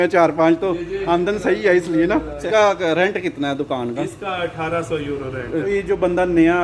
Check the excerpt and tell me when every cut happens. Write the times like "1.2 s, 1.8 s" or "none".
2.5 s, 5.7 s